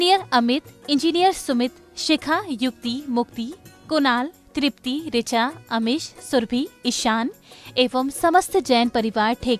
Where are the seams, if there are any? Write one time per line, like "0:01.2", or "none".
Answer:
none

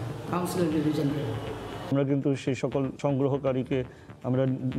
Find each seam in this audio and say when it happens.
0:01.8

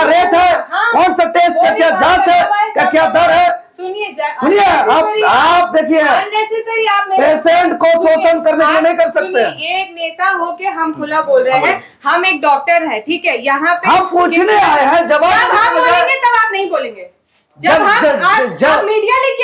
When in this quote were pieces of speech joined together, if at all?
none

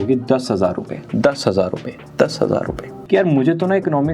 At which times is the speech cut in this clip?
0:03.0

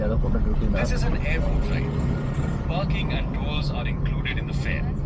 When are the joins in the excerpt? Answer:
none

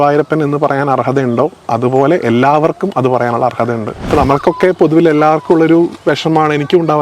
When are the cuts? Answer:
0:03.9

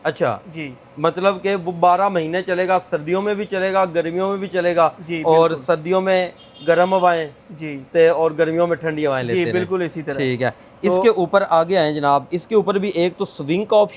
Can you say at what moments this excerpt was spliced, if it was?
none

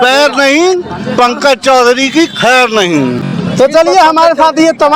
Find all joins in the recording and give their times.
none

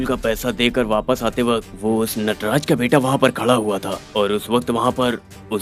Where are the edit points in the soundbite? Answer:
none

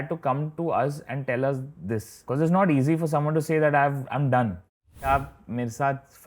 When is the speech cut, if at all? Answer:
0:02.1
0:05.1

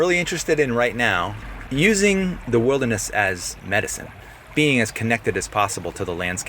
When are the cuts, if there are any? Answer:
0:01.4
0:02.4
0:04.2

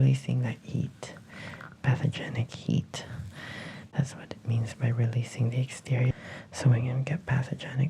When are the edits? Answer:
0:06.1

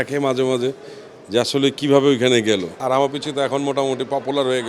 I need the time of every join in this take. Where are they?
0:02.8

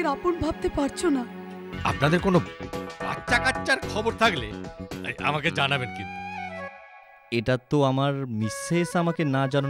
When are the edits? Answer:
0:01.6

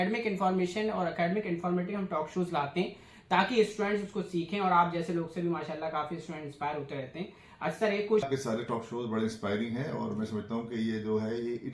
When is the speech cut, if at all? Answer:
0:08.2

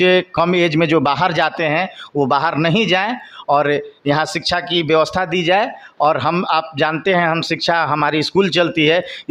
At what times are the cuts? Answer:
none

